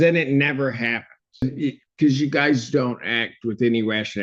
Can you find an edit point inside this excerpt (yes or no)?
yes